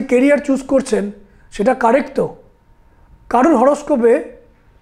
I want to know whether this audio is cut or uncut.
uncut